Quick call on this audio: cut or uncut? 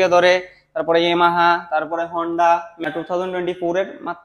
cut